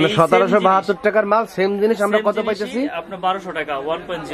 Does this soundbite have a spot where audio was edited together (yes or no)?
no